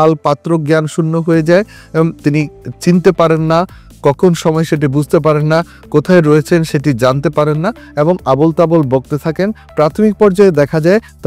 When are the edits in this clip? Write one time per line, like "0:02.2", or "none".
none